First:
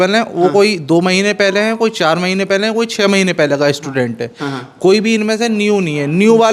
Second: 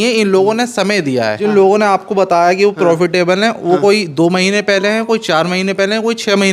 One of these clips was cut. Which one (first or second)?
second